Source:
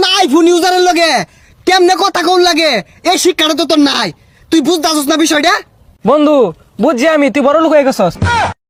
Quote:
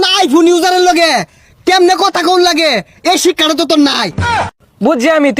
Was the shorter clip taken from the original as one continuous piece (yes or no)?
no